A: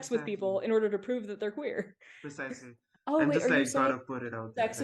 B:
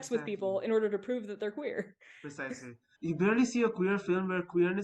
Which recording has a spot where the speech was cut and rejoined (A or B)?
A